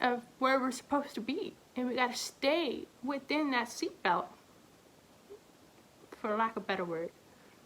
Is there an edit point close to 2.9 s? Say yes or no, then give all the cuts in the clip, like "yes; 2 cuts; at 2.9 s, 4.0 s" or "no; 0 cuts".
yes; 2 cuts; at 1.6 s, 2.9 s